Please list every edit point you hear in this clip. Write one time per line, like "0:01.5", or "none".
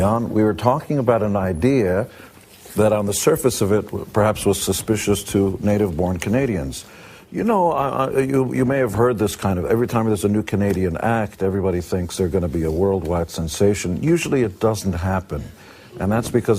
0:05.2